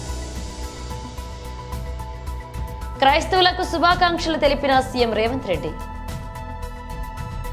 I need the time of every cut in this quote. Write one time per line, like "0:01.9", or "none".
none